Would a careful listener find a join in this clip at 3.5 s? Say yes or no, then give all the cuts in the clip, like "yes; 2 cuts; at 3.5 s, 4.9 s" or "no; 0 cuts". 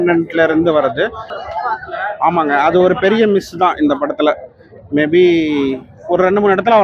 no; 1 cut; at 1.3 s